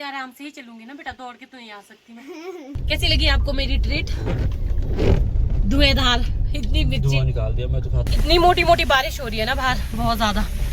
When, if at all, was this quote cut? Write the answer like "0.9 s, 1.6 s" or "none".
2.8 s, 8.0 s